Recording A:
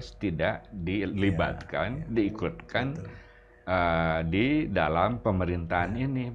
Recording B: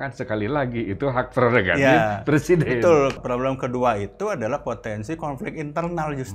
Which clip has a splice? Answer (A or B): B